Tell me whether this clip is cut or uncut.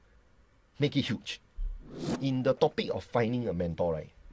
cut